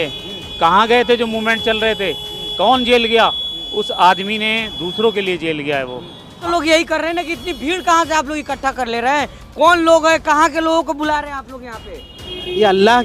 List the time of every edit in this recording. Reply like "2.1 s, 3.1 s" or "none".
6.3 s